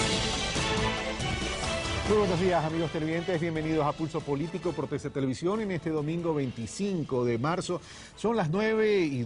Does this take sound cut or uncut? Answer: uncut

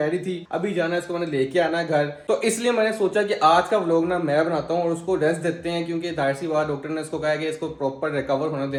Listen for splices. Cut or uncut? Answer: uncut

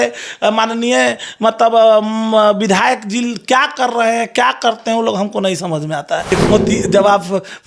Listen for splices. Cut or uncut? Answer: cut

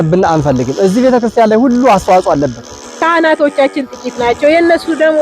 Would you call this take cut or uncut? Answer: cut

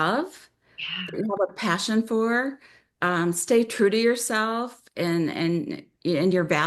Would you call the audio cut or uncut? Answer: uncut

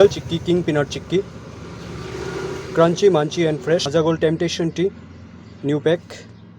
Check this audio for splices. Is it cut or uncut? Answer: cut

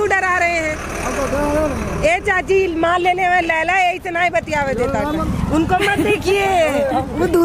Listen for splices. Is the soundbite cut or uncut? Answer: cut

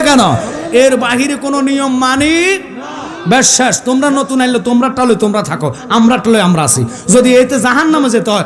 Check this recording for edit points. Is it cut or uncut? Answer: uncut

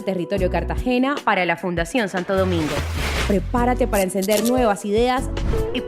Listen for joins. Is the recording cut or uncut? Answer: uncut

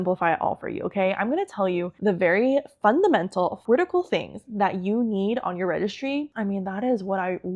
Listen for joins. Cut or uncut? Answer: cut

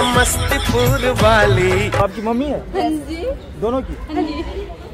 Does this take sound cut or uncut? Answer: cut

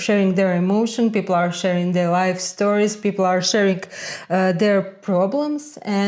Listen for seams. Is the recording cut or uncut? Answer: uncut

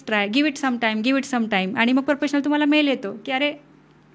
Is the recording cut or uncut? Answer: uncut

